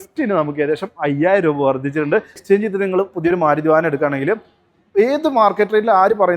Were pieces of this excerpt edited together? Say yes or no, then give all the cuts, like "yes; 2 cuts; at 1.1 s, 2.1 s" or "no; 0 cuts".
yes; 1 cut; at 2.4 s